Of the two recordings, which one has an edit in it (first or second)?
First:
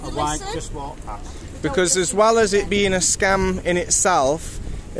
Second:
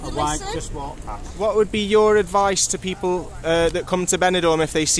second